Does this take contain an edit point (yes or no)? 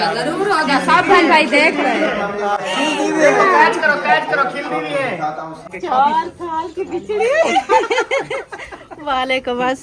yes